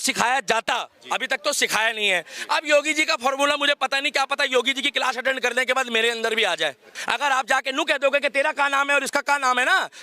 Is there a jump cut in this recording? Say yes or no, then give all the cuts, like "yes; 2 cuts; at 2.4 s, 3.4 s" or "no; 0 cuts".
yes; 1 cut; at 7.0 s